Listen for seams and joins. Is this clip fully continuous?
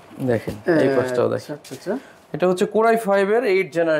yes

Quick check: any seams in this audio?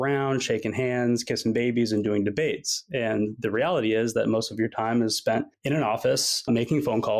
no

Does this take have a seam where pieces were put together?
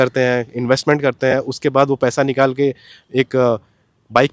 no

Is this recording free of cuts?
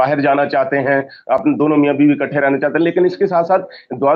yes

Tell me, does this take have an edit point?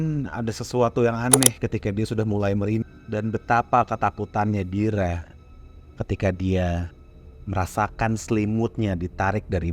yes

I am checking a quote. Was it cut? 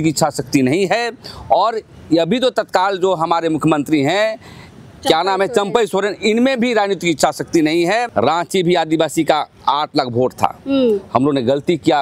yes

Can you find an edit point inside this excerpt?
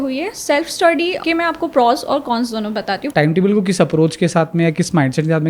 yes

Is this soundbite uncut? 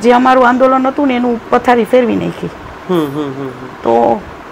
yes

